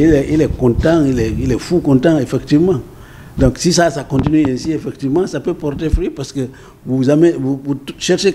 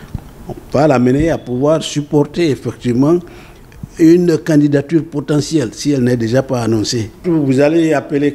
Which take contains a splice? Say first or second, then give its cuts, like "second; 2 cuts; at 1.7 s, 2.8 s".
second; 1 cut; at 7.2 s